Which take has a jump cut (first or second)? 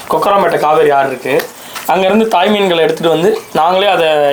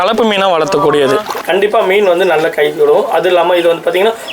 second